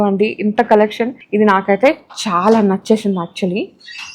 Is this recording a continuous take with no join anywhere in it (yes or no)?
no